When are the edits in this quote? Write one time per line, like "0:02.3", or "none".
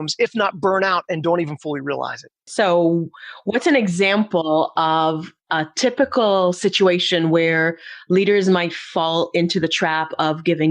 0:02.5